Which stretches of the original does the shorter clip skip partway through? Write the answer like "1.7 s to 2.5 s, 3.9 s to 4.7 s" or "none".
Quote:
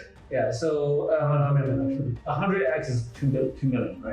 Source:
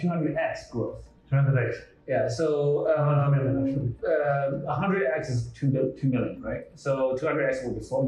4.0 s to 4.6 s

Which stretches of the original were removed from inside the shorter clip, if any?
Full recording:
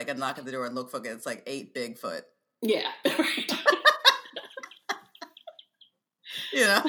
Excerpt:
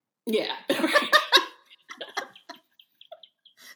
3.3 s to 3.6 s

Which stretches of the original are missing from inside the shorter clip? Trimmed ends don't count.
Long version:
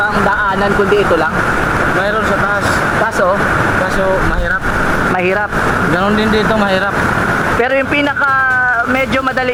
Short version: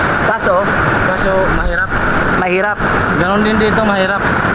none

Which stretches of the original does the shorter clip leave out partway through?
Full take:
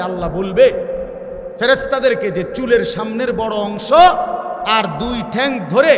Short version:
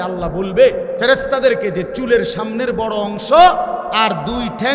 0.9 s to 1.5 s, 4.5 s to 4.6 s

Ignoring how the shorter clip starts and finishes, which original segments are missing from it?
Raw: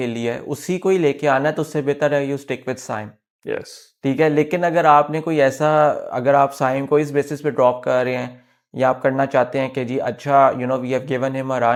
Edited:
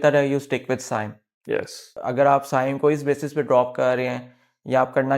3.9 s to 6.0 s

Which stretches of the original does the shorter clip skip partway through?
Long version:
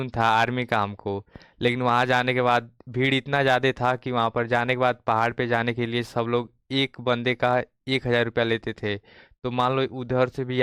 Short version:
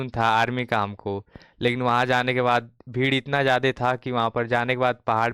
none

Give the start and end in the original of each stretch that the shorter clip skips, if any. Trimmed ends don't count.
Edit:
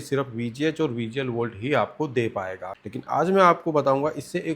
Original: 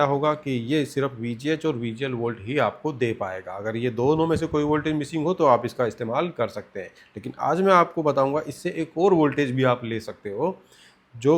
3.5 s to 7.0 s

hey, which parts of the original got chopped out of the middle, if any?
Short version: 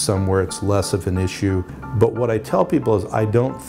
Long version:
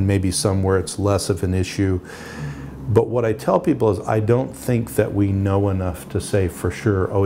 2.2 s to 2.7 s

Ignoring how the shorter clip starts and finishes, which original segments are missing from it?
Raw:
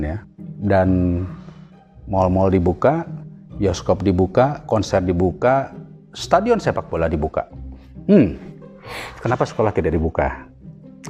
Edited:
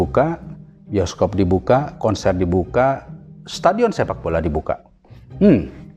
none

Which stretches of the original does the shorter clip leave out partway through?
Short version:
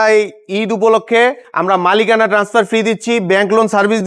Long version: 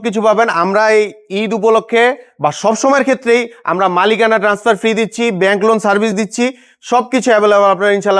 2.3 s to 3.6 s

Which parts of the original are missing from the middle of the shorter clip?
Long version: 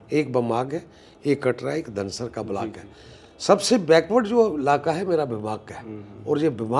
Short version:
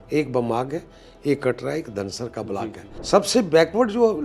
2.9 s to 3.2 s

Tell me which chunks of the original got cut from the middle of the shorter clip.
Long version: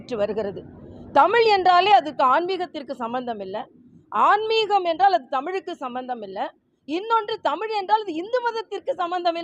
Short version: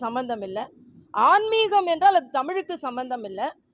none

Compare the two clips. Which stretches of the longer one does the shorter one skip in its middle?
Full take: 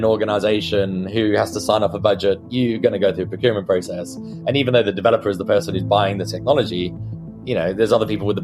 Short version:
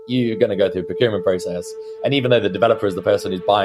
none

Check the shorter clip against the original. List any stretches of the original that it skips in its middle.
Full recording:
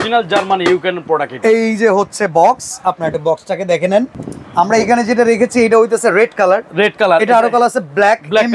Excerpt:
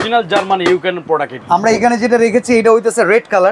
1.3 s to 4.4 s

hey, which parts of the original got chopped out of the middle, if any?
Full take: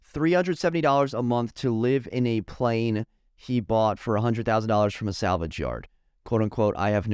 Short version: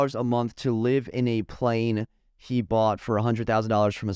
none

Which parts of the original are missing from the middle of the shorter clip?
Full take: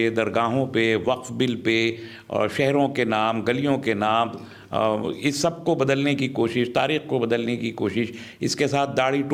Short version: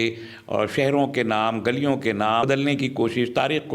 4.3 s to 5.8 s

